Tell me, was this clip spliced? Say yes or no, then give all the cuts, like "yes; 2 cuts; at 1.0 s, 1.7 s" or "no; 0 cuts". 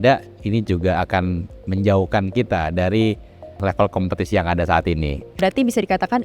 yes; 2 cuts; at 3.6 s, 5.3 s